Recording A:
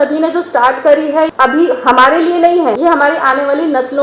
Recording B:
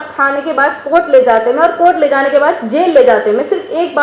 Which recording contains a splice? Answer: A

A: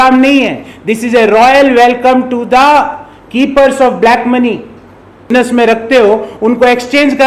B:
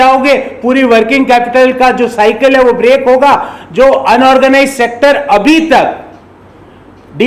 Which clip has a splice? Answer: A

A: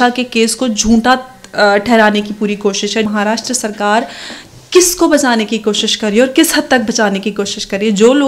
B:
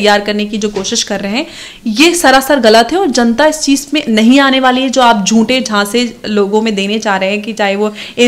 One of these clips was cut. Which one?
A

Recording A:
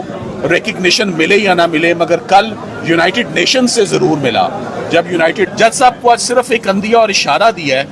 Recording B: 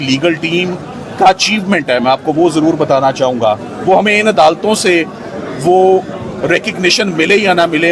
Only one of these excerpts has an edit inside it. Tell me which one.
A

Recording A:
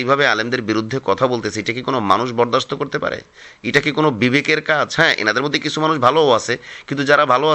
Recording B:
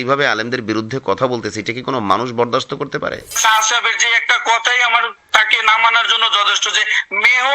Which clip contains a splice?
B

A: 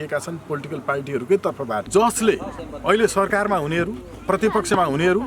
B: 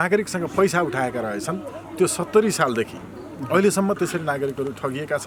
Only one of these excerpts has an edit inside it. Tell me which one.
A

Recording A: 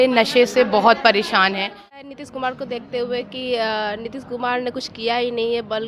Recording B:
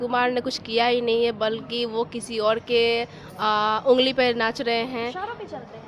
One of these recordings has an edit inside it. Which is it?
A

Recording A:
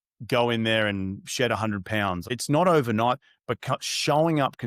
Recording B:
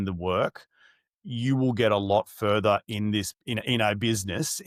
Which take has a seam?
A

